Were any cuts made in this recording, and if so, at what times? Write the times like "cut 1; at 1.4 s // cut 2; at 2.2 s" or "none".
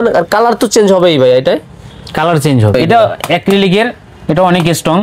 cut 1; at 2.7 s